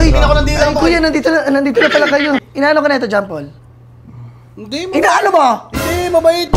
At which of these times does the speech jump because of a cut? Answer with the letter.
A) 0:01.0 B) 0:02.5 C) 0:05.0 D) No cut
B